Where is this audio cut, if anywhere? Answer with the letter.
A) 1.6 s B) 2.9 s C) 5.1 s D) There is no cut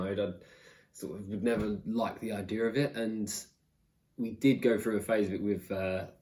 D